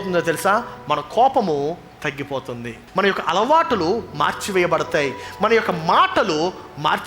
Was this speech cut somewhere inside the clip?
yes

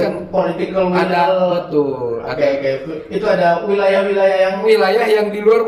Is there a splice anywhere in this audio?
no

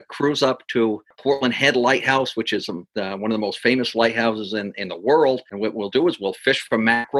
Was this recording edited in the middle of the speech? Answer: yes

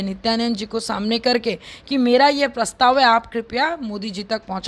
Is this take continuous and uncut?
yes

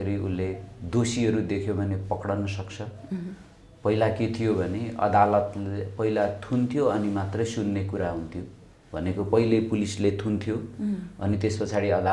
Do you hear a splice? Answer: no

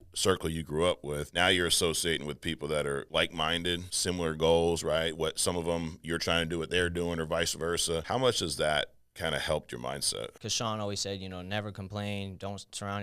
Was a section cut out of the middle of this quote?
yes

